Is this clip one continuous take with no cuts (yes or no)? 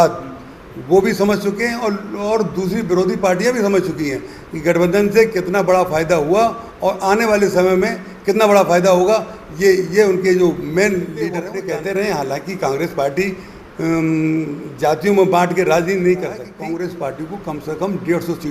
no